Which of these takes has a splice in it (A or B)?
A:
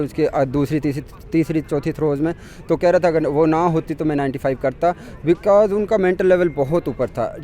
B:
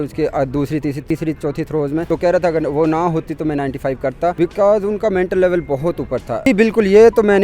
B